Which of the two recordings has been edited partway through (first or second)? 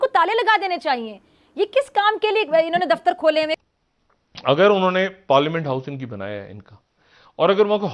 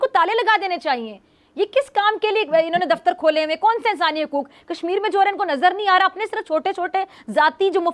first